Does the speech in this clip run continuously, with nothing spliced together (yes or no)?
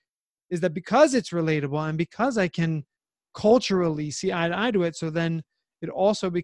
yes